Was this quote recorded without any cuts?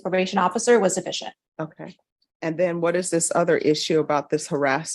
no; 1 cut; at 1.1 s

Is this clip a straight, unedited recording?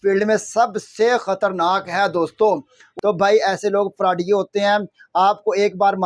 no; 1 cut; at 2.8 s

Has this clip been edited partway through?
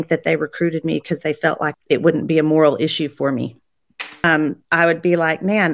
yes; 2 cuts; at 1.7 s, 4.2 s

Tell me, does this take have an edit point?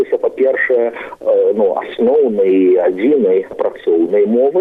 no; 0 cuts

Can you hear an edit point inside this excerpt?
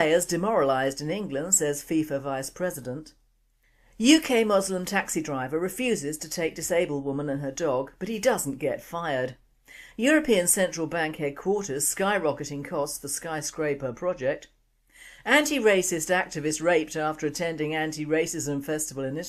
yes; 1 cut; at 4.2 s

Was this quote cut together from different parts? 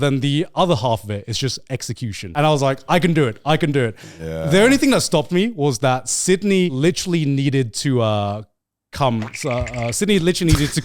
yes; 2 cuts; at 2.2 s, 6.7 s

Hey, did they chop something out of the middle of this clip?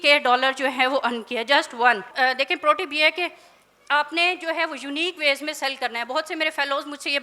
no; 0 cuts

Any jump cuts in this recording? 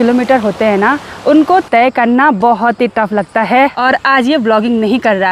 yes; 1 cut; at 3.8 s

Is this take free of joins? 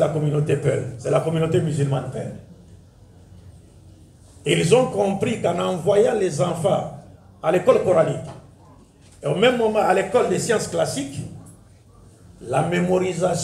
no; 1 cut; at 0.9 s

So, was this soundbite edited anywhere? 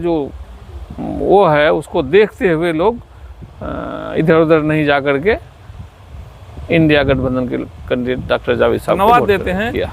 yes; 1 cut; at 9.0 s

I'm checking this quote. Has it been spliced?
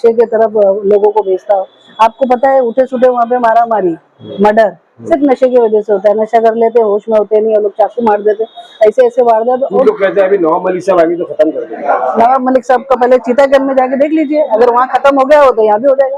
no; 0 cuts

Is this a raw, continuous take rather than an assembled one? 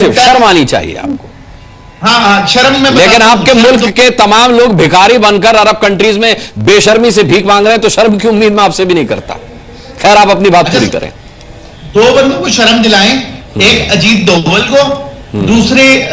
yes; 0 cuts

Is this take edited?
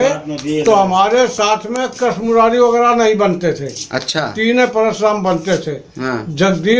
no; 0 cuts

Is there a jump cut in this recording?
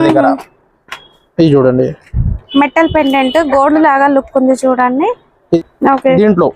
yes; 1 cut; at 5.6 s

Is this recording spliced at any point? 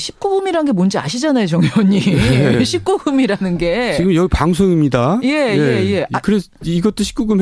yes; 1 cut; at 5.3 s

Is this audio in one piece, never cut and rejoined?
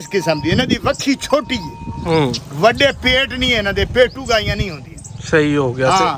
yes; 0 cuts

